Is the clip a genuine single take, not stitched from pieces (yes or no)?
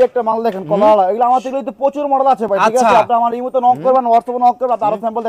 yes